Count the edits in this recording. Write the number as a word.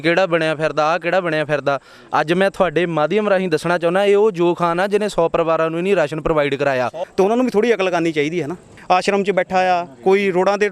two